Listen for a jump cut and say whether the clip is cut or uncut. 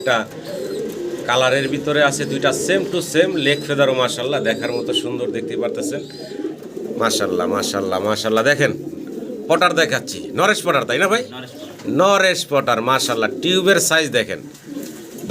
cut